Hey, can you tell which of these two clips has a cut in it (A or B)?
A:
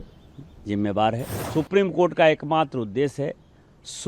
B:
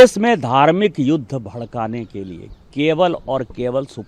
A